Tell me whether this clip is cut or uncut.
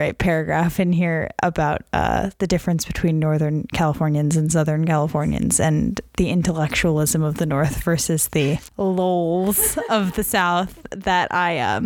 uncut